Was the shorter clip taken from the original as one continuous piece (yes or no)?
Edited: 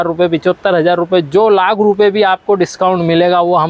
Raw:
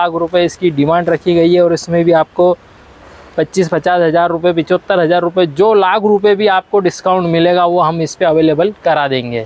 yes